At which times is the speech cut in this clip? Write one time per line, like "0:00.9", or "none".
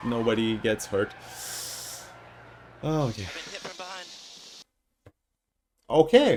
none